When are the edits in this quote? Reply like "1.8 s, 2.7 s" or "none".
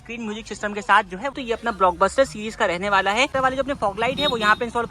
1.3 s, 3.3 s